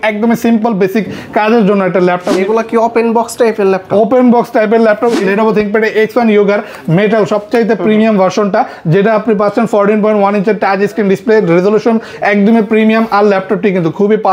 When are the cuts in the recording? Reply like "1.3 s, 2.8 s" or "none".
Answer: 2.3 s, 5.2 s